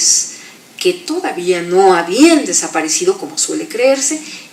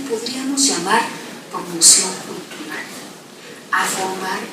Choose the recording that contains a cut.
second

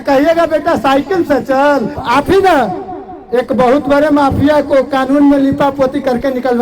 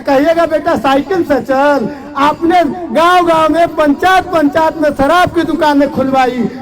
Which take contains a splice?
first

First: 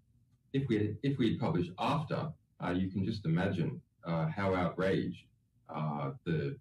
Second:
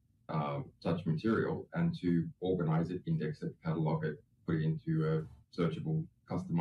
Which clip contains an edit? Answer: second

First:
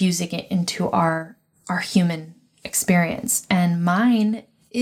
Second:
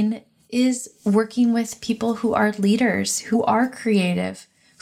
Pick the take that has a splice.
second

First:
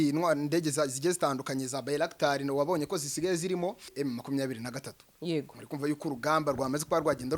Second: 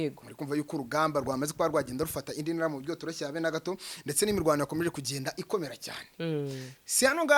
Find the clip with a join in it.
first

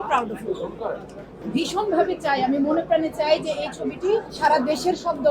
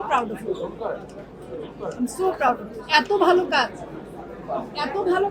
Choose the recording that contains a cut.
first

